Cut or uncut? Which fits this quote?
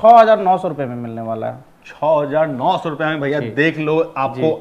uncut